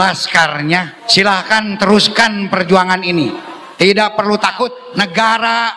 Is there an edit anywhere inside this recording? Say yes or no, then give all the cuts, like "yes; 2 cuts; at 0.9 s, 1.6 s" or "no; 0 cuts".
yes; 2 cuts; at 1.0 s, 4.8 s